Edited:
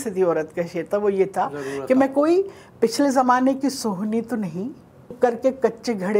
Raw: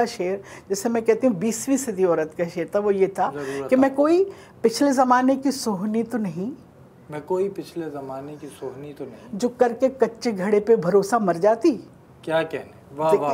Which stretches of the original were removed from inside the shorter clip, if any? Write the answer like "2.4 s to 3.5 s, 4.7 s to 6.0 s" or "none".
7.0 s to 9.5 s